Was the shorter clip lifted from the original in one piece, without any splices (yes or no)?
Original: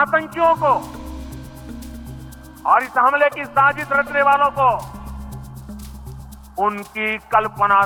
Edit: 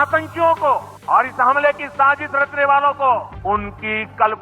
no